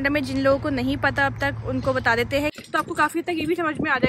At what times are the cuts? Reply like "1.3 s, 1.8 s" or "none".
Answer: 2.5 s